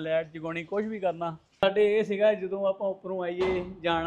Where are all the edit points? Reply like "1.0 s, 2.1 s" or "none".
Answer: 1.6 s